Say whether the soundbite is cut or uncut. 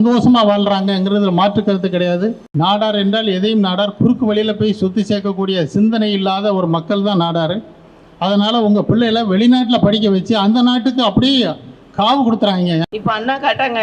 cut